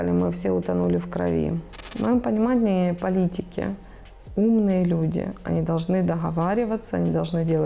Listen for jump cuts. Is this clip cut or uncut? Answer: cut